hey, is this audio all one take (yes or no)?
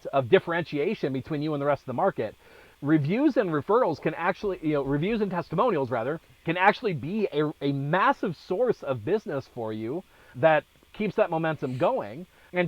no